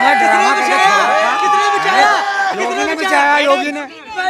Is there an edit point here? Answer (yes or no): no